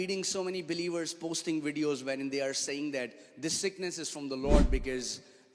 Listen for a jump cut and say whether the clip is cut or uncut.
uncut